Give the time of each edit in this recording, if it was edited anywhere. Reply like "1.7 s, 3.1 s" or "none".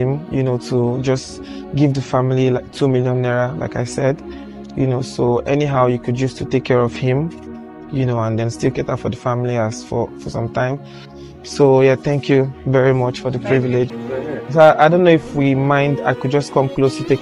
13.9 s